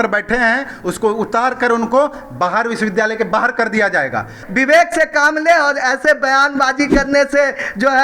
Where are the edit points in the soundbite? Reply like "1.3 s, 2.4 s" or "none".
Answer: 4.4 s